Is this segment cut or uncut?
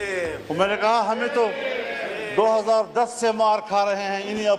uncut